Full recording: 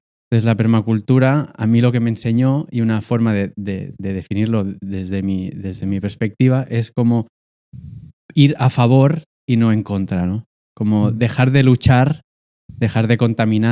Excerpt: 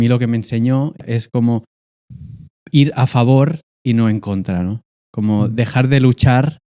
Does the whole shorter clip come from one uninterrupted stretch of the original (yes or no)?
no